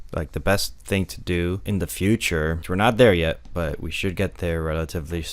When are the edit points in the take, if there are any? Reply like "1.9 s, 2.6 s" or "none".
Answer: 1.6 s, 2.6 s

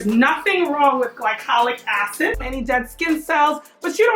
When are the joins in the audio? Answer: 2.4 s

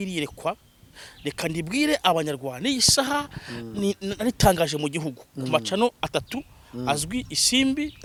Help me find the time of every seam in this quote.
none

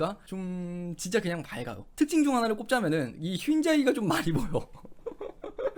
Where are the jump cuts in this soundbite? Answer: none

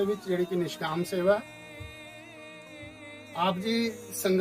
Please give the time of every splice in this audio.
1.4 s, 2.9 s

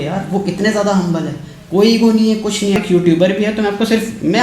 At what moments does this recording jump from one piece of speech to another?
2.8 s

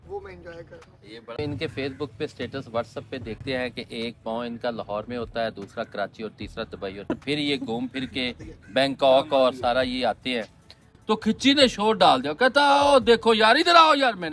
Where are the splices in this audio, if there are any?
1.4 s, 3.4 s, 7.1 s, 10.9 s

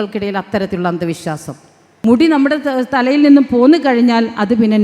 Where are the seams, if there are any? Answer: 1.8 s

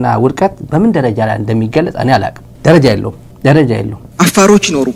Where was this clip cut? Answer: none

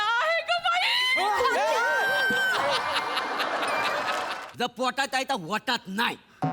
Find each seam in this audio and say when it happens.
4.4 s

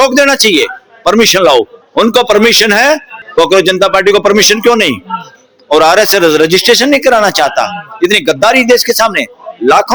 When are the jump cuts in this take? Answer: none

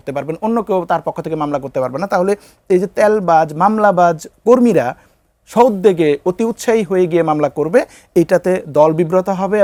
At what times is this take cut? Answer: none

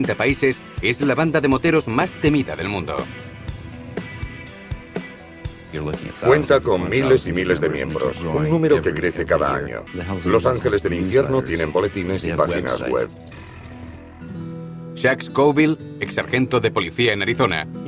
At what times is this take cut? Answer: 15.0 s

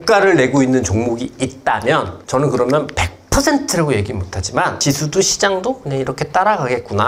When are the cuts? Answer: none

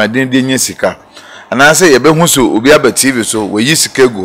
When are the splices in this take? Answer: none

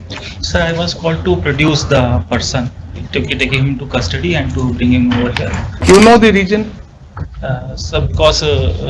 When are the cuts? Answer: 5.8 s

